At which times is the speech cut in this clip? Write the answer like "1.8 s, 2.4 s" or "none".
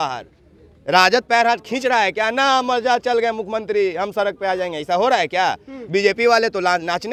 none

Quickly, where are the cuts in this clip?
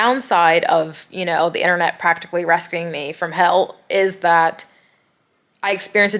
none

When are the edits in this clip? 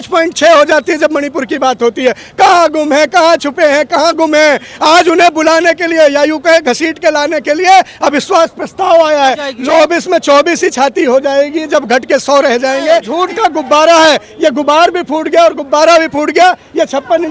9.5 s, 13.1 s

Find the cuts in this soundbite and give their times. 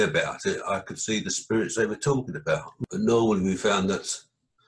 2.7 s

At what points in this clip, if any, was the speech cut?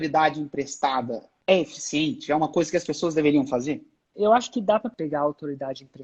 1.2 s, 4.1 s, 4.9 s

